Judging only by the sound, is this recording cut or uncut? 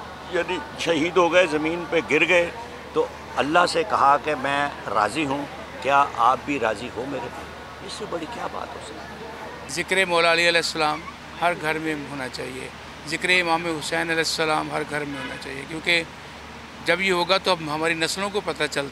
cut